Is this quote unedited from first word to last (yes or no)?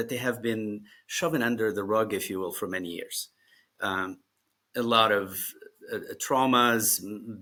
yes